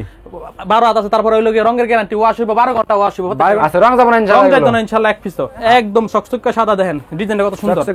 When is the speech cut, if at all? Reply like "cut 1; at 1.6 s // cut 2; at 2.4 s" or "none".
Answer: cut 1; at 3.6 s // cut 2; at 5.6 s

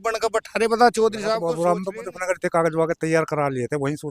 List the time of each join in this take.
cut 1; at 1.5 s

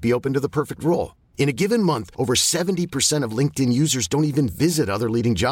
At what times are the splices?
none

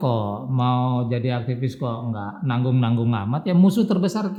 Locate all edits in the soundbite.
none

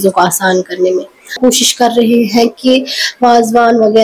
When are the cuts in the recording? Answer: cut 1; at 1.4 s

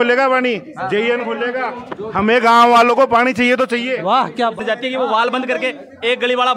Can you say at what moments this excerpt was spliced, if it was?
cut 1; at 4.6 s

